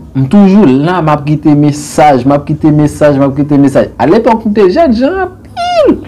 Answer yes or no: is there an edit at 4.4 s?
no